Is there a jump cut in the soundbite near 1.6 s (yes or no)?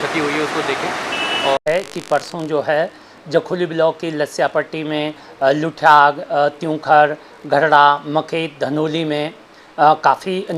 yes